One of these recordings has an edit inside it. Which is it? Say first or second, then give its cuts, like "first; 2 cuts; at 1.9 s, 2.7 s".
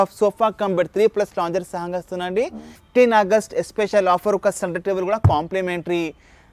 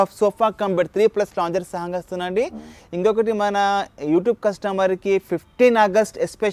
first; 1 cut; at 2.8 s